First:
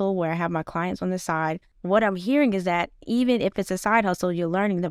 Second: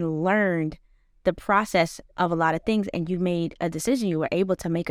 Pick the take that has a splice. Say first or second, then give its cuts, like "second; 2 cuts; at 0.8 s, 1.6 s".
first; 1 cut; at 1.7 s